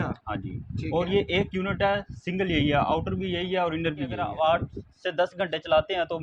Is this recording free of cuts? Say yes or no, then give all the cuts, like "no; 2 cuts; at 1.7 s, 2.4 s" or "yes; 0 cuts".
no; 1 cut; at 4.1 s